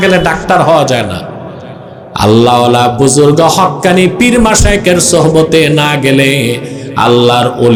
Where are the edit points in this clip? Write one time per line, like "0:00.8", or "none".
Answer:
none